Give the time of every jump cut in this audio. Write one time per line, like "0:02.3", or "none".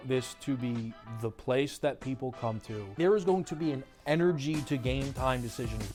none

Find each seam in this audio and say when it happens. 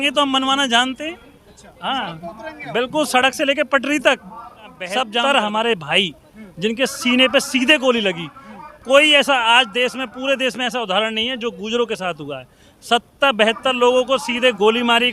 0:05.1

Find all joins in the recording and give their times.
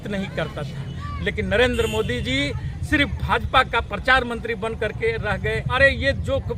0:01.0
0:05.7

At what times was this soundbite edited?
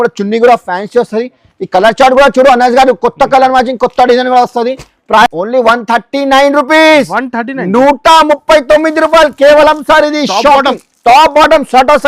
0:05.3

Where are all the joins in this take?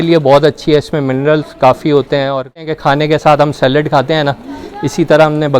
0:02.7

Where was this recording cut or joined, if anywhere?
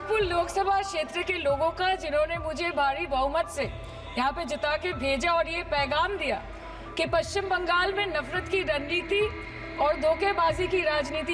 none

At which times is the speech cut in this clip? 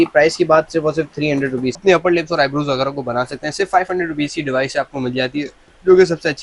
0:01.8

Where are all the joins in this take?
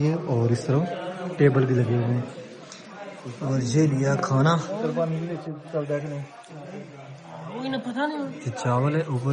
none

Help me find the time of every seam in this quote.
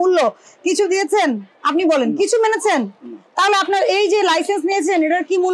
none

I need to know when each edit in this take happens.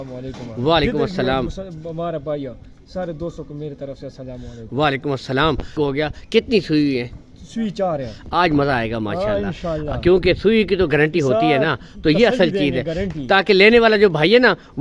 0:05.8

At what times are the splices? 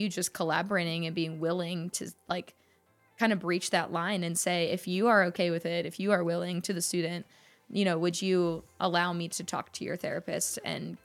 none

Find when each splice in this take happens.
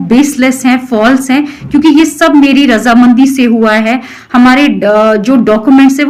none

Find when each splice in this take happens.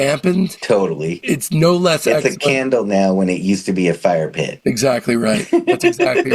none

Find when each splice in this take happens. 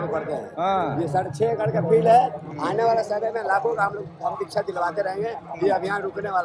none

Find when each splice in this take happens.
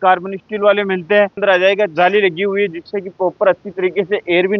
0:01.4

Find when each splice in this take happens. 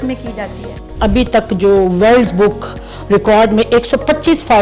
0:01.0

